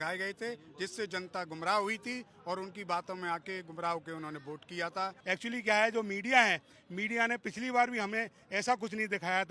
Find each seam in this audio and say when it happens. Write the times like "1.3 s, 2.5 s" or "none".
5.2 s